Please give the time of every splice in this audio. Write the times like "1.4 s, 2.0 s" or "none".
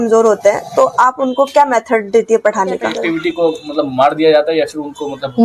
2.9 s